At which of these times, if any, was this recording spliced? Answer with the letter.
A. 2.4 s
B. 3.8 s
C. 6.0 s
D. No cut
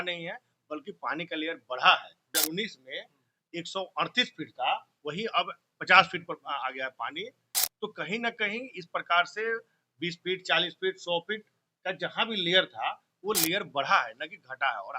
A